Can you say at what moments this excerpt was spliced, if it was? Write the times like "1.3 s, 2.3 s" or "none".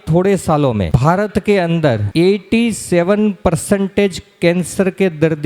0.9 s, 2.0 s